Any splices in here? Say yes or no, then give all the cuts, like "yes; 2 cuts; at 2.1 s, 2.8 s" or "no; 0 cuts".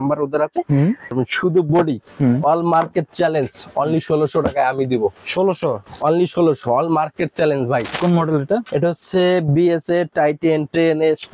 yes; 2 cuts; at 1.1 s, 8.0 s